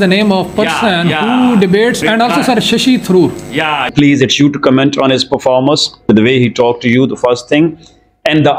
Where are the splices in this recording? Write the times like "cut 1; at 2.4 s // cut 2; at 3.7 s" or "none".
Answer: cut 1; at 2.0 s // cut 2; at 3.9 s // cut 3; at 6.0 s